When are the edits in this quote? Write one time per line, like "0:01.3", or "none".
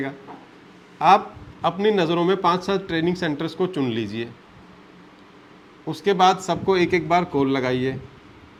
none